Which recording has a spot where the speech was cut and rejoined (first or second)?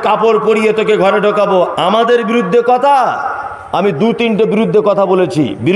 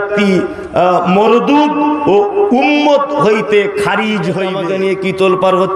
second